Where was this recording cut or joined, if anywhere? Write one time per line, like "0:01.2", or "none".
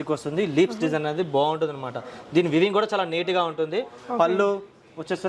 none